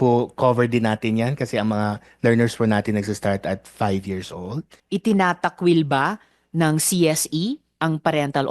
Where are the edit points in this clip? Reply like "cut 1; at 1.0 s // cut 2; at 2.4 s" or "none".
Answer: cut 1; at 4.7 s